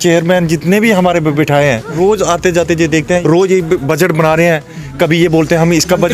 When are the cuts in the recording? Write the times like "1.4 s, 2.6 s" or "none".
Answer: 1.9 s, 3.2 s